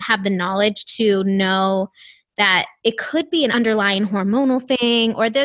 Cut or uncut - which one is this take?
cut